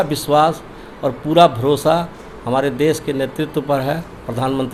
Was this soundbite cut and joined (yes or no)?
no